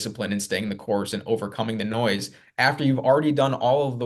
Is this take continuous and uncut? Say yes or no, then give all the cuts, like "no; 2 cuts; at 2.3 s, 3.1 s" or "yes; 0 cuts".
yes; 0 cuts